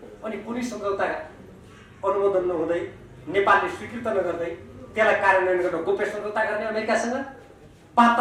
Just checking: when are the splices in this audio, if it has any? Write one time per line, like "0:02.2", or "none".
none